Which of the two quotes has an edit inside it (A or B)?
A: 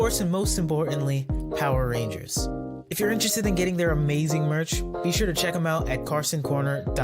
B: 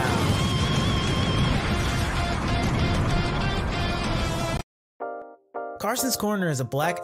B